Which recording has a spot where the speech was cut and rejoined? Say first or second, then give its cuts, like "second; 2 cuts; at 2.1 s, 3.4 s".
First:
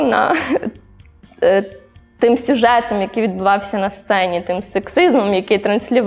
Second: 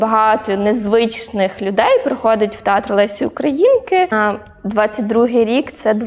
second; 1 cut; at 4.1 s